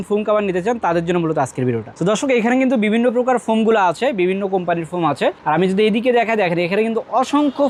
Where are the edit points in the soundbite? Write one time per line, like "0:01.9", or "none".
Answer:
none